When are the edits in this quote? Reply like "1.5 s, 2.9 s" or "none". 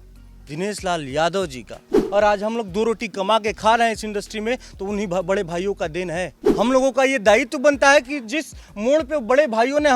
1.9 s, 6.4 s